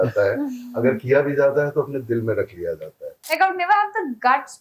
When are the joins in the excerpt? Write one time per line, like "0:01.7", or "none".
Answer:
0:03.1